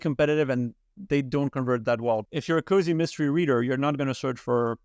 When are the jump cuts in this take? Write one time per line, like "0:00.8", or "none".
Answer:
0:02.3

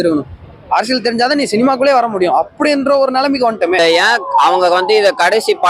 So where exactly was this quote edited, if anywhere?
0:03.8

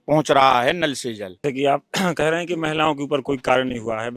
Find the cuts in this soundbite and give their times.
0:01.3

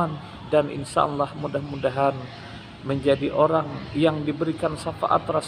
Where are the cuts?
none

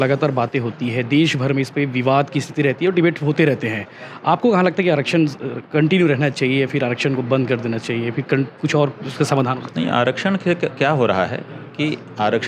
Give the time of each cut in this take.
none

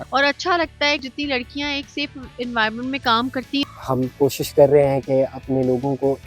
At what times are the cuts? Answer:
0:01.0
0:03.6

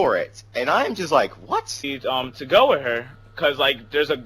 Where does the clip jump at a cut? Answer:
0:01.9

